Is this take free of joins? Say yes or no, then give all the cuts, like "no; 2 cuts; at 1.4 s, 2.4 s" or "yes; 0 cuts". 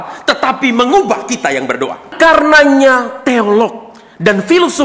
no; 1 cut; at 2.1 s